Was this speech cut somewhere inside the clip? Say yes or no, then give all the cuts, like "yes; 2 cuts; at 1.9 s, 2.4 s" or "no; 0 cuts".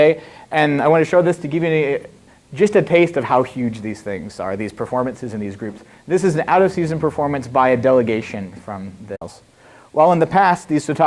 no; 0 cuts